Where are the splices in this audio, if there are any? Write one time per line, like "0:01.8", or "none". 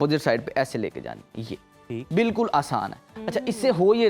none